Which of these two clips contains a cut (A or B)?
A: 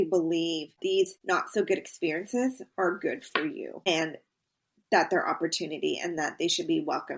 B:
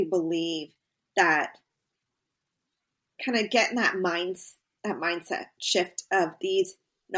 A